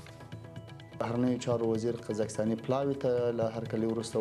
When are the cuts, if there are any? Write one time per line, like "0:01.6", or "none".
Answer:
0:01.0

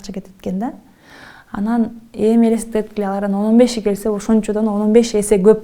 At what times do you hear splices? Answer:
none

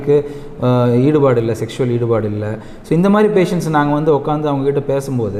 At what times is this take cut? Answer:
none

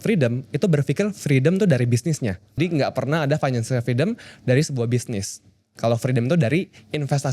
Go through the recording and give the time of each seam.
0:02.5

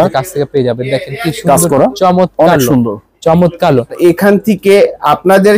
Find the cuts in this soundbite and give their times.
0:04.0

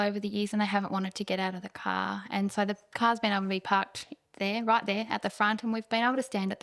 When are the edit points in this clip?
none

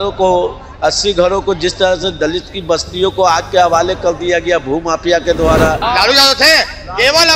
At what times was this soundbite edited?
0:05.8

